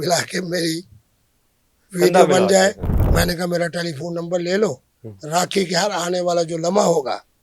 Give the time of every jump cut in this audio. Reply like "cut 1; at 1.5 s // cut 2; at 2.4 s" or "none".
cut 1; at 2.9 s